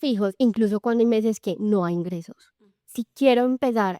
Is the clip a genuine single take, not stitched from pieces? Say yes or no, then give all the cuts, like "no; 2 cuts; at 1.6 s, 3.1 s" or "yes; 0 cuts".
no; 1 cut; at 2.5 s